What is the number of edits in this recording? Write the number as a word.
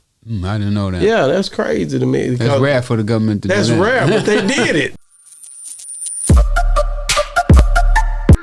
one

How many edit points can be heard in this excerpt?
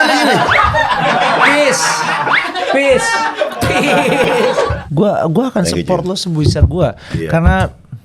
one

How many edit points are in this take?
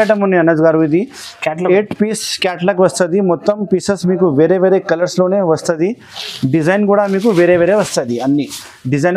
zero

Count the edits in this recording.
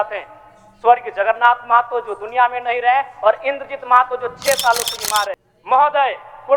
one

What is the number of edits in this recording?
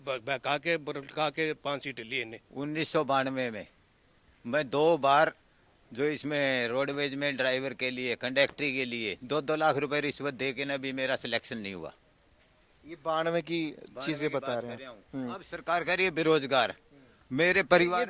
one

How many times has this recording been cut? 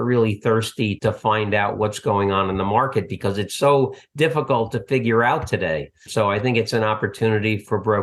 two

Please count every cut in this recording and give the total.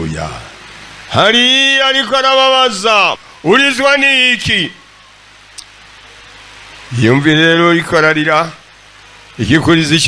one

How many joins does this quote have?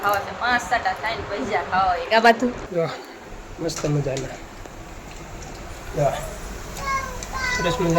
one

